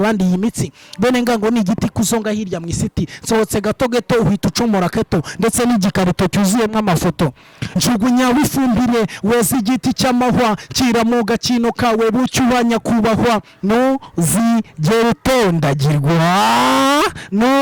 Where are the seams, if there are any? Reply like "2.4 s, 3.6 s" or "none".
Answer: 7.6 s

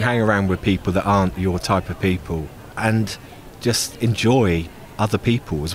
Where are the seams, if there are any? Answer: 2.6 s, 4.8 s

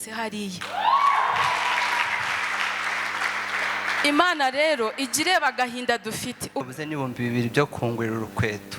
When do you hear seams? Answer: 6.7 s

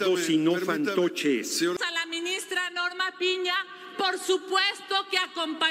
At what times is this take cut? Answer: 1.8 s

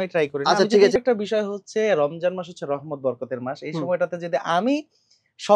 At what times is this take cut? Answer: 0.9 s

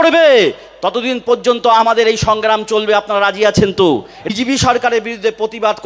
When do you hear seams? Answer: 4.2 s

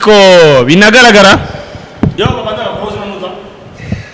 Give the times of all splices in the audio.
none

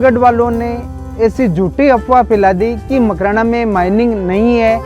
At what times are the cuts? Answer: none

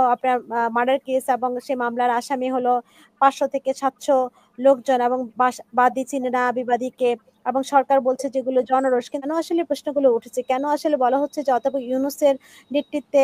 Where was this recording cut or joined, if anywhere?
9.3 s

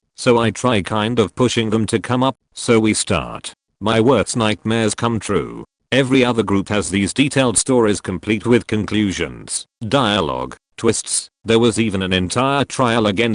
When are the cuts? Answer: 2.3 s

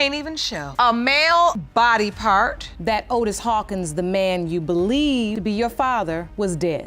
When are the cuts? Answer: 2.7 s

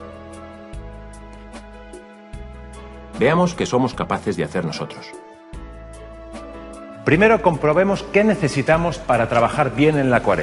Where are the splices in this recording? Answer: none

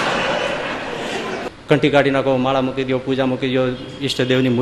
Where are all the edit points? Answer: 1.5 s

